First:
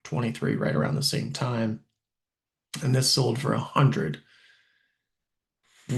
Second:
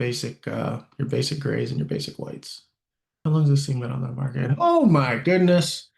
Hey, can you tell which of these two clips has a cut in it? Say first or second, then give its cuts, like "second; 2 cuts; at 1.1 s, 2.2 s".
second; 1 cut; at 3.1 s